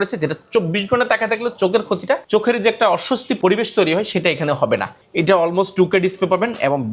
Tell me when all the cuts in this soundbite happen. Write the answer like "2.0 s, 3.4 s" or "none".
2.2 s, 3.4 s, 4.9 s